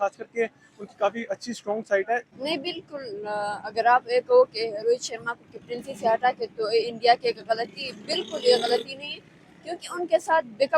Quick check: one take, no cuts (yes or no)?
no